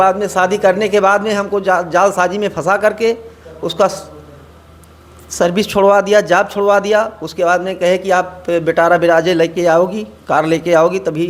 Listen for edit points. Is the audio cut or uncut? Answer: uncut